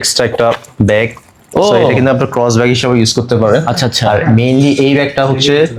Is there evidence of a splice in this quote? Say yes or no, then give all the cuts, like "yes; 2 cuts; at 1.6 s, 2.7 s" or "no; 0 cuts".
no; 0 cuts